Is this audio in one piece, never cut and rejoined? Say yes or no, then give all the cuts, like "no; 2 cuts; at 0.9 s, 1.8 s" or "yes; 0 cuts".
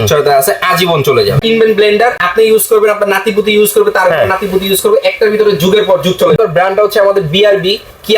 no; 3 cuts; at 1.4 s, 2.2 s, 6.4 s